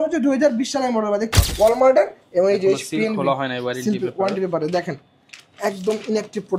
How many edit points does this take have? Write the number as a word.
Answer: one